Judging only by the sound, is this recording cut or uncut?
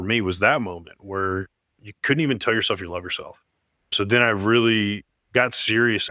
uncut